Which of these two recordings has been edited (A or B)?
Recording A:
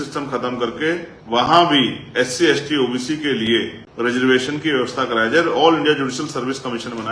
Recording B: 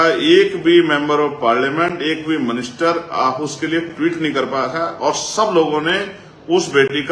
A